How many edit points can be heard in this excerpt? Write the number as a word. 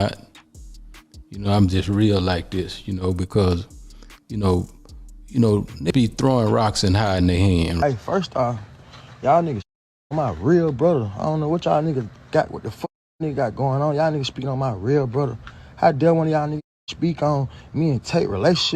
two